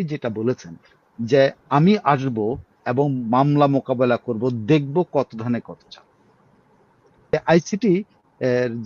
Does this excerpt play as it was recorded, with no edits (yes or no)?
no